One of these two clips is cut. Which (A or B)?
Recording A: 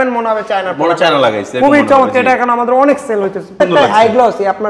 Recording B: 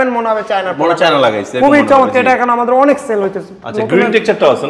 A